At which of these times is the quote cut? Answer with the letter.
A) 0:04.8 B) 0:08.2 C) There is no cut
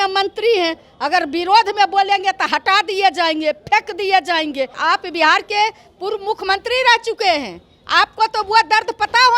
A